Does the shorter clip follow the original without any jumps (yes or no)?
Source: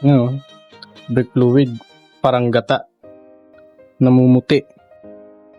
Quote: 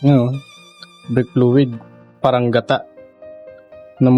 yes